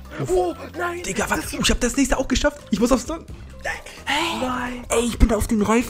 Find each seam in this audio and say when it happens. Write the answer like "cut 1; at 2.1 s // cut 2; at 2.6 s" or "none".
none